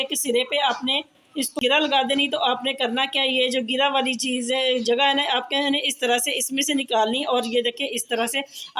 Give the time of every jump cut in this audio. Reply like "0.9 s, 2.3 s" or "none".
1.6 s